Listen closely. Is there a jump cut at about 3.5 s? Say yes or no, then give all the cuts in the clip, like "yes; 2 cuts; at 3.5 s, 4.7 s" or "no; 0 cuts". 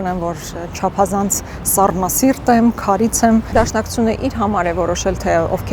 yes; 1 cut; at 3.5 s